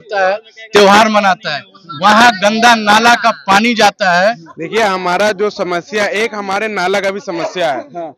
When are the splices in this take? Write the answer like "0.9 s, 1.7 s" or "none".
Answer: 4.5 s